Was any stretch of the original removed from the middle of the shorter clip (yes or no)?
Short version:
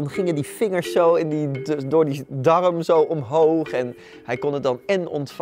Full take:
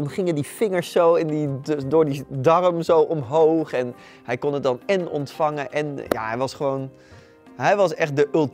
no